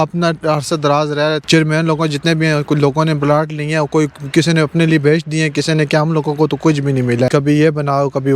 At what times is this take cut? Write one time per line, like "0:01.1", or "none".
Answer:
0:01.4
0:07.3